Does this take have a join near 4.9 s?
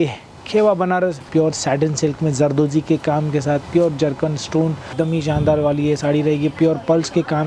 yes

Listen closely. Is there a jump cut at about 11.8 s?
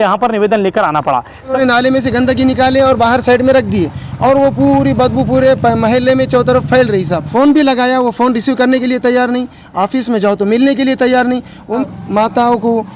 yes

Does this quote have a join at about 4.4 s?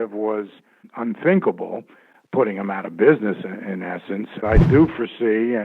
yes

